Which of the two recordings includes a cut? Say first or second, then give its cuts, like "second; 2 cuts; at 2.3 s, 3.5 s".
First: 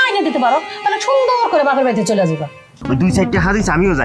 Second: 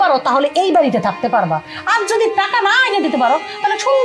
first; 1 cut; at 2.7 s